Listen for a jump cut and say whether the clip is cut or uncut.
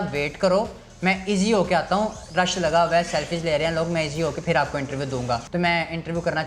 cut